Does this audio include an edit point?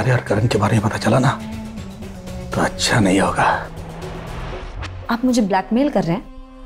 no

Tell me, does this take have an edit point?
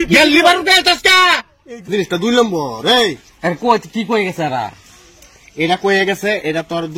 yes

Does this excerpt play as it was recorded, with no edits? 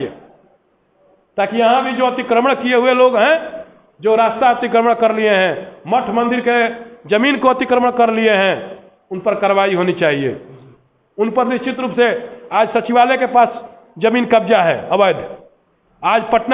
yes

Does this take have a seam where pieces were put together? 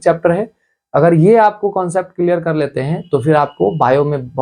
no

